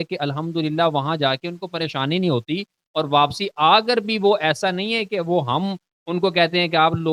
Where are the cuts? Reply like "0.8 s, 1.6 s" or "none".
none